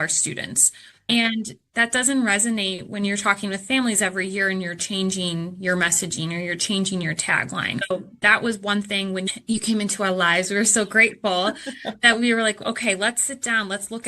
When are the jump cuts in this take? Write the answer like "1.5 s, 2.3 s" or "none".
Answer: 1.1 s, 7.8 s, 9.3 s